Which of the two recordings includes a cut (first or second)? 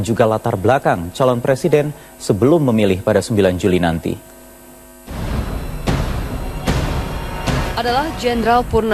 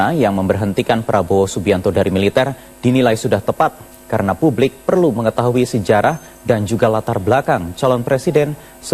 second